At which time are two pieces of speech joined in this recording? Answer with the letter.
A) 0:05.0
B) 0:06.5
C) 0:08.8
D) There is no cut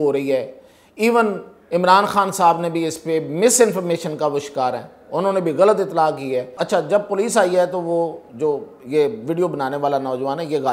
B